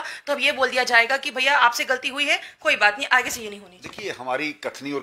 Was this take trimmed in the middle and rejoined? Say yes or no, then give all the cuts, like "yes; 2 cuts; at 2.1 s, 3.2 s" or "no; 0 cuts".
no; 0 cuts